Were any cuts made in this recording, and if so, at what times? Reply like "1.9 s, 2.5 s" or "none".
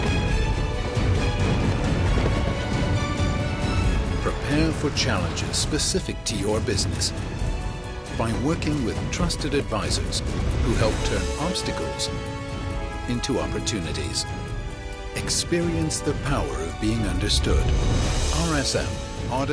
none